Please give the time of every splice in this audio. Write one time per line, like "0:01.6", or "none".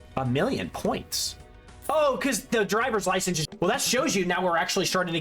0:03.4